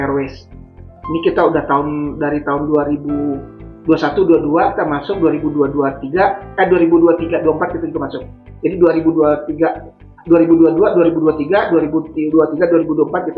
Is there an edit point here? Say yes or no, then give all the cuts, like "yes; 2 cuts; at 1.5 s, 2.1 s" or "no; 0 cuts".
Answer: no; 0 cuts